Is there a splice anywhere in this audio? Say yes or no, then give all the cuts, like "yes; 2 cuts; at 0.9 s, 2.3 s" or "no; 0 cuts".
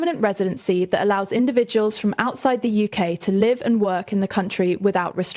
no; 0 cuts